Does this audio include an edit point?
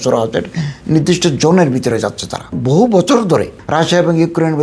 yes; 1 cut; at 2.5 s

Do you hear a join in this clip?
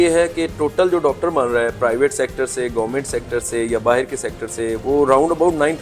no; 0 cuts

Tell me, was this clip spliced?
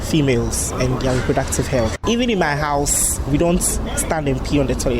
yes; 1 cut; at 2.0 s

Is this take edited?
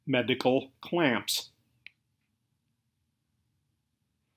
no; 0 cuts

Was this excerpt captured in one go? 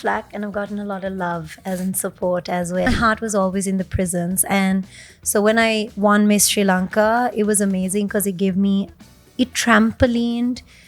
no; 1 cut; at 2.9 s

